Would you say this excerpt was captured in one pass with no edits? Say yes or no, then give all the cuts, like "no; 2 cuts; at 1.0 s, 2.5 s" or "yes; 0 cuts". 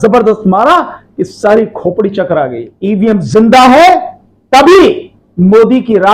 no; 1 cut; at 2.7 s